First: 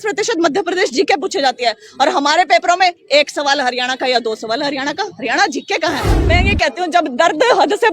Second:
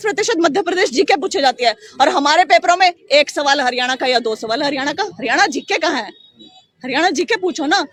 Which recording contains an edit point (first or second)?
first